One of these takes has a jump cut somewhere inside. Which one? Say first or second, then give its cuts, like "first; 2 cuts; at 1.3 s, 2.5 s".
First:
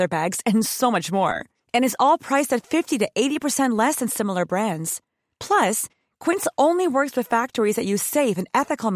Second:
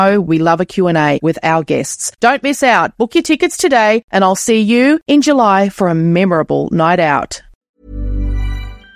second; 1 cut; at 7.7 s